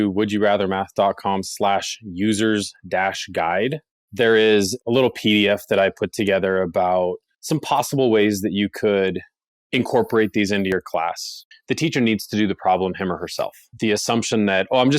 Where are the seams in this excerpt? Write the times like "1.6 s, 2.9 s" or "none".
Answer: 11.4 s, 13.7 s